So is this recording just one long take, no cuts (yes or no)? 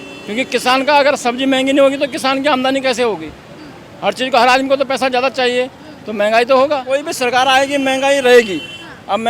no